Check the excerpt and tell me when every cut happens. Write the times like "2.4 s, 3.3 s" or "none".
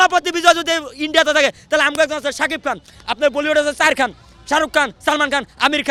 none